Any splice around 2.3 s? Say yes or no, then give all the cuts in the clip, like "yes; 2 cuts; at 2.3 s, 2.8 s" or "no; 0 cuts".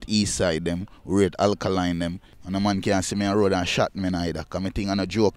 yes; 1 cut; at 2.3 s